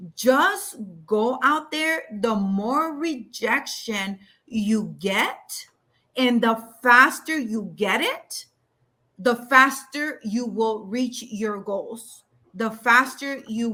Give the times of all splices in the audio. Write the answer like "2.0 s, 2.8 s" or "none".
none